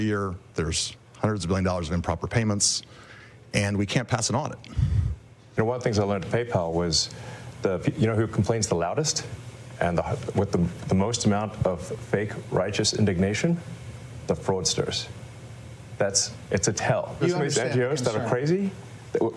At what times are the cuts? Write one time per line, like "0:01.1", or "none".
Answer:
0:05.5